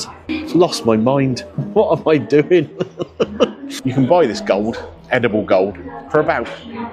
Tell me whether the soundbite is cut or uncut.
cut